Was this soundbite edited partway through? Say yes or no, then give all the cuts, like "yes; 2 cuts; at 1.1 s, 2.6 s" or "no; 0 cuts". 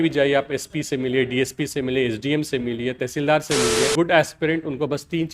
yes; 1 cut; at 3.9 s